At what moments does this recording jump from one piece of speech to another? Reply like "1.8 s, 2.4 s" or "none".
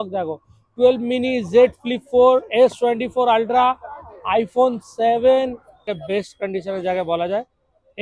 5.9 s